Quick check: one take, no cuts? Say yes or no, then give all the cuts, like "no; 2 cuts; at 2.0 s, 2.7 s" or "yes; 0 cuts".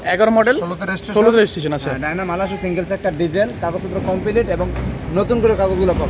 yes; 0 cuts